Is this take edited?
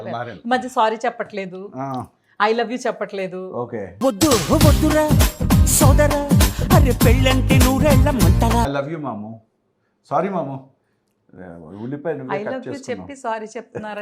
yes; 1 cut; at 8.7 s

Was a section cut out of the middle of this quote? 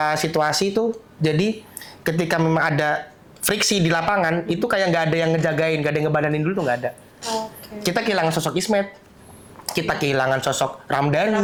no; 0 cuts

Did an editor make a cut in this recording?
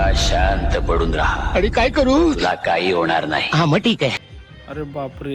yes; 1 cut; at 4.2 s

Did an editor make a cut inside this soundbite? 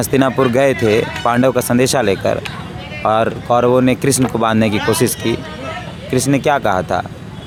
no; 0 cuts

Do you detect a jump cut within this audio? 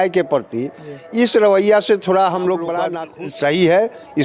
yes; 1 cut; at 3.0 s

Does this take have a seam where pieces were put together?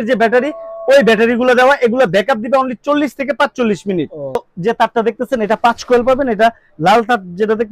yes; 1 cut; at 4.5 s

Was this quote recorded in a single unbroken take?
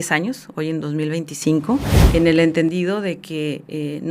no; 1 cut; at 2.0 s

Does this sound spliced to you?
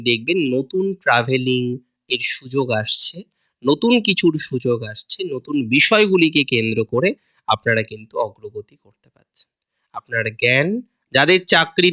yes; 1 cut; at 10.9 s

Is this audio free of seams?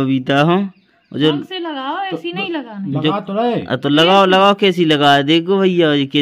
yes; 0 cuts

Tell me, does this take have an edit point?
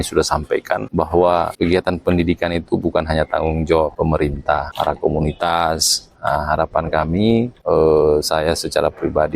yes; 4 cuts; at 0.9 s, 1.5 s, 4.3 s, 7.5 s

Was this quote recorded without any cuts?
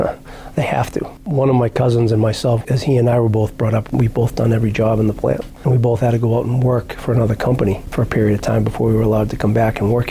no; 4 cuts; at 1.2 s, 2.6 s, 3.9 s, 5.5 s

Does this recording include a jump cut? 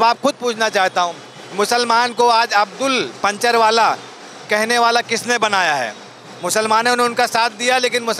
no; 0 cuts

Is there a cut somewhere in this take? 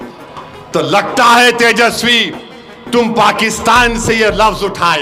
no; 0 cuts

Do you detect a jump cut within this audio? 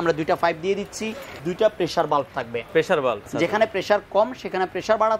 yes; 2 cuts; at 1.4 s, 3.3 s

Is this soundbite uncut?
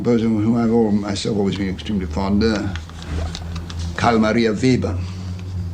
no; 1 cut; at 1.8 s

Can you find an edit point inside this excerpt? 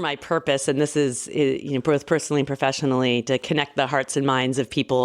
no; 0 cuts

